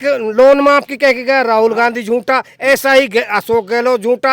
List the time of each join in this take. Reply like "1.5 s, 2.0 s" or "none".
none

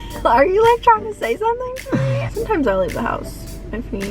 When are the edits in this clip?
2.3 s

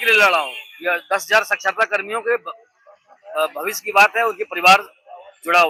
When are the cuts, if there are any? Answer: none

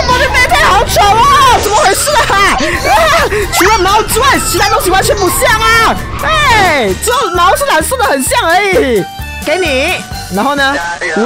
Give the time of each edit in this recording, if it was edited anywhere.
9.2 s

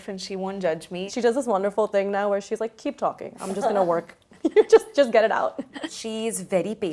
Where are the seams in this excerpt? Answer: 1.1 s, 6.0 s

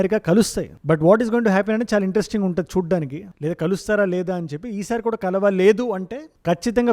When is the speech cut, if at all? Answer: none

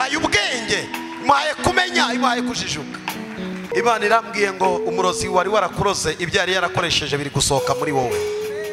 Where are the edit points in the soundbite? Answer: 3.7 s

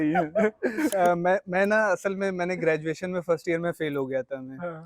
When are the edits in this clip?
0.9 s

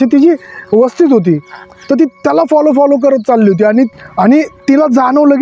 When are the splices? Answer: 4.0 s

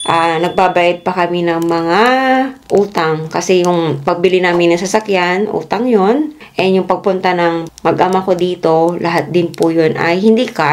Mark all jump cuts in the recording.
none

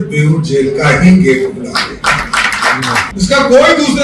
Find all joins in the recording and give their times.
3.1 s

